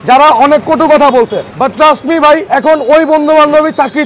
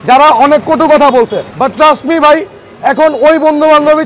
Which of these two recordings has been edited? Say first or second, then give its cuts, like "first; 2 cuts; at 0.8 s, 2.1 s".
first; 1 cut; at 2.4 s